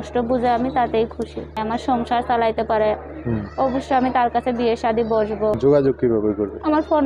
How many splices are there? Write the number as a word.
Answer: two